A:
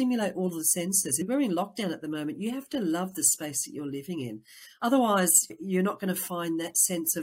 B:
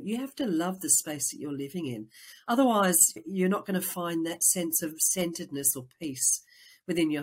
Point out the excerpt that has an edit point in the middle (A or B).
A